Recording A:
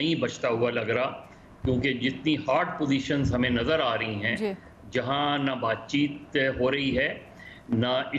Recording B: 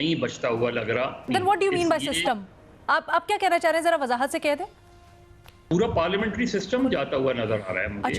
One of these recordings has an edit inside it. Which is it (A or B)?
B